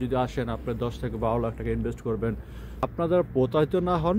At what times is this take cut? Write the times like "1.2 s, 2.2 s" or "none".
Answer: 2.8 s